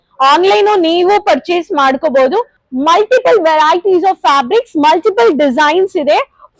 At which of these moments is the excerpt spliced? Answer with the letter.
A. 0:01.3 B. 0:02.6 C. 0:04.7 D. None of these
B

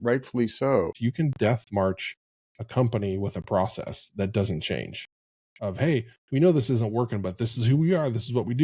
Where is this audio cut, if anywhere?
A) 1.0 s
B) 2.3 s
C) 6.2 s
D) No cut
A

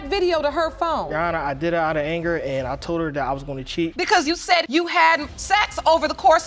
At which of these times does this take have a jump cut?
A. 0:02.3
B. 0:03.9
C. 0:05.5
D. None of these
B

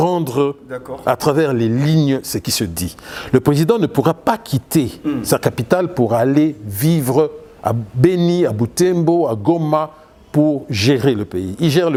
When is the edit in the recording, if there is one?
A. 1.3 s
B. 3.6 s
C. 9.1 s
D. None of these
D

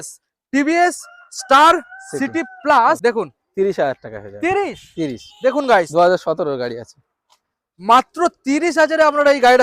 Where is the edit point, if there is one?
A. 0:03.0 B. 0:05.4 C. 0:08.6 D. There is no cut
A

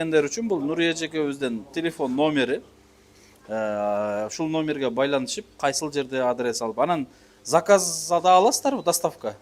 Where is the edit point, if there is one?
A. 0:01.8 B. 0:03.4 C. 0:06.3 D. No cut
D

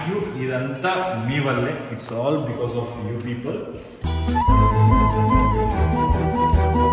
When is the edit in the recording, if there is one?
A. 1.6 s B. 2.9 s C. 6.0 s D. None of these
D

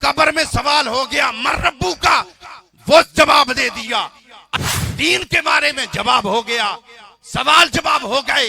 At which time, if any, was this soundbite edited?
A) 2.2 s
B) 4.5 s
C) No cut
B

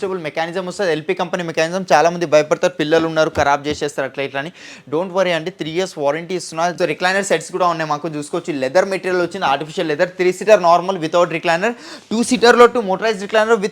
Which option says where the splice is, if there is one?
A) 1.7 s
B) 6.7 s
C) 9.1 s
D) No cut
B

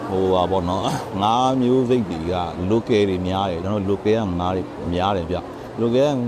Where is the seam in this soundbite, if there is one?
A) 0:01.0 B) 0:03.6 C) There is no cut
C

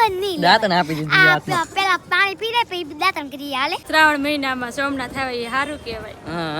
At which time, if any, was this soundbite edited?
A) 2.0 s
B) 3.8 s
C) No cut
B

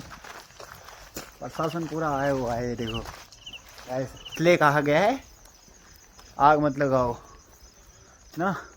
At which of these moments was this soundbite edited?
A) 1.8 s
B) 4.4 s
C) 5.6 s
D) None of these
B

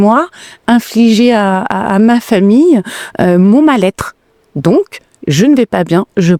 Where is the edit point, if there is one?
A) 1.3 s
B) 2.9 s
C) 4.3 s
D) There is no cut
D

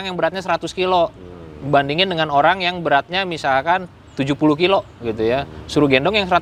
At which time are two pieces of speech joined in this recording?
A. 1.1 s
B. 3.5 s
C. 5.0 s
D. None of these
D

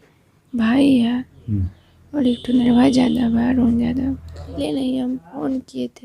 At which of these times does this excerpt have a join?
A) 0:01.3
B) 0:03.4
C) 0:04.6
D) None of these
C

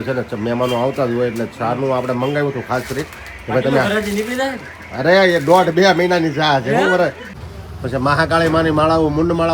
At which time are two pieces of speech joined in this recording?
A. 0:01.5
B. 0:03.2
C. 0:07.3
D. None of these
C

